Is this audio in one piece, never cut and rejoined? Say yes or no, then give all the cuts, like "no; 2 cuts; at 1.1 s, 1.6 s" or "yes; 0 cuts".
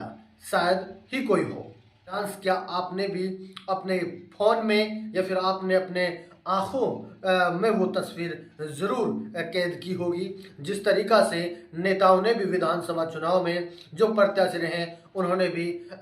no; 1 cut; at 2.3 s